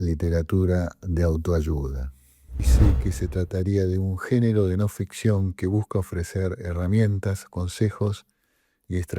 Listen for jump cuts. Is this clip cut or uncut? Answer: cut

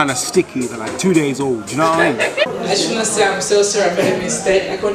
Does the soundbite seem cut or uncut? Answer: cut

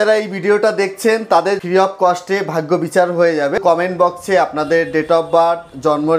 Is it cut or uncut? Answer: cut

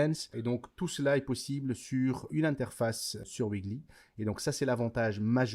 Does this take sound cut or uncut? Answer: cut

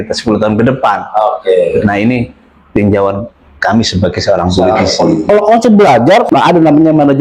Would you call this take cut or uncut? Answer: cut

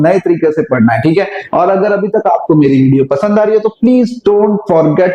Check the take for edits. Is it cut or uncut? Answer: uncut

